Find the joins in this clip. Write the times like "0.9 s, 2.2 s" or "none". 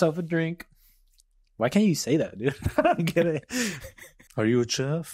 4.2 s